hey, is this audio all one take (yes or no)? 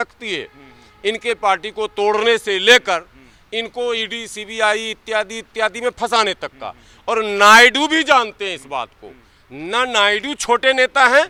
yes